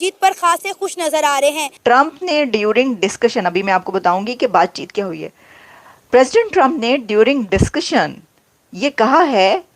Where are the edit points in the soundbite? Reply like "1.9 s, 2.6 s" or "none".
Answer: 1.7 s